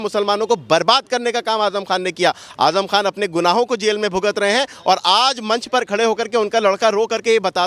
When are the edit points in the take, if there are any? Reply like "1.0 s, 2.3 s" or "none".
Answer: none